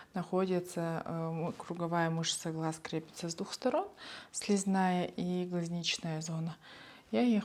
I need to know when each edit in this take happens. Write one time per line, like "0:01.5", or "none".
none